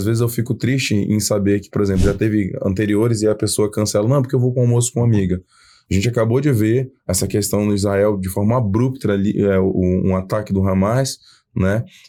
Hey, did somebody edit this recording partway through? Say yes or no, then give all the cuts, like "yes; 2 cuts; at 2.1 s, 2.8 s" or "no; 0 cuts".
no; 0 cuts